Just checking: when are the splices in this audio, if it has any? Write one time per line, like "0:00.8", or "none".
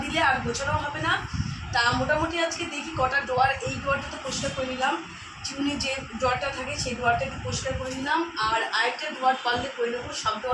none